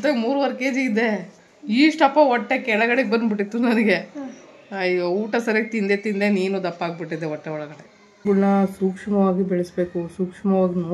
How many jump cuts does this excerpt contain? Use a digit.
1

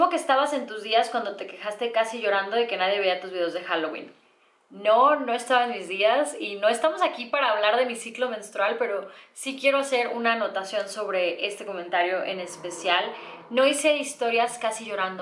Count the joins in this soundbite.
0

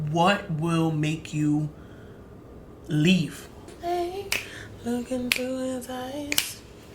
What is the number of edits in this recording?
1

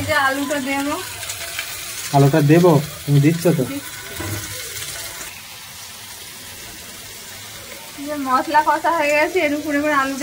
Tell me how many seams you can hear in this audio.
0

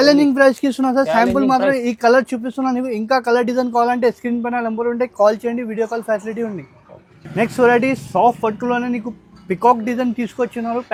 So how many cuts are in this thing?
0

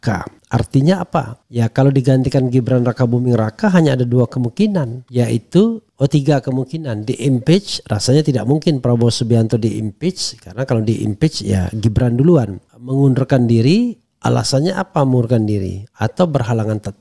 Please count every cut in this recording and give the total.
0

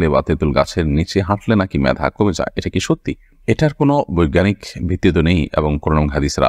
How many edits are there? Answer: 0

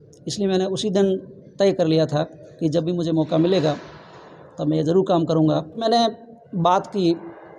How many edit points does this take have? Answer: 1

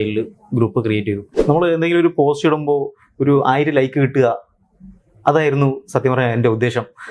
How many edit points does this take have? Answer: 1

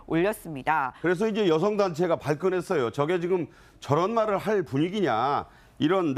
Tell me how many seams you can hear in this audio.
1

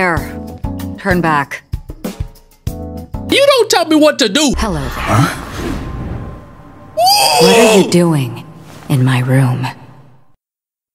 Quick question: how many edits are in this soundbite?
1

